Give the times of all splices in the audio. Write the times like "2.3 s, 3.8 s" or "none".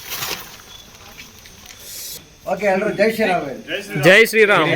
2.3 s